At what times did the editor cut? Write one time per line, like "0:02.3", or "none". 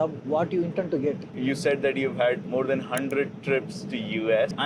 0:01.3
0:02.4